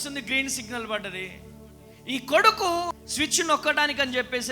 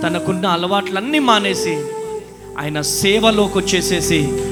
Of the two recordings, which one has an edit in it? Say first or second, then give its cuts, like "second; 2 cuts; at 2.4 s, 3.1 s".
first; 1 cut; at 3.0 s